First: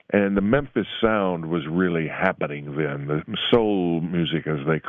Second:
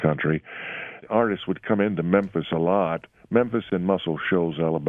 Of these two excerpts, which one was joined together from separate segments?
second; 1 cut; at 1.0 s

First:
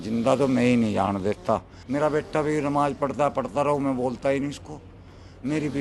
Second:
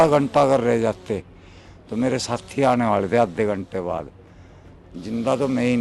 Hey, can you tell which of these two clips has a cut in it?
first; 1 cut; at 1.8 s

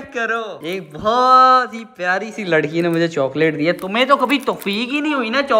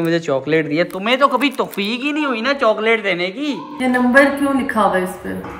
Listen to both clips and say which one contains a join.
second; 1 cut; at 3.7 s

